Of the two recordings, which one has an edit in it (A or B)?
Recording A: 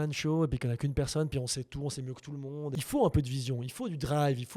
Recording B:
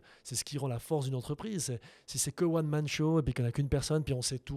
A